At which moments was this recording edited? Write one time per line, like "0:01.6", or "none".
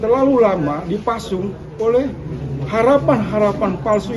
none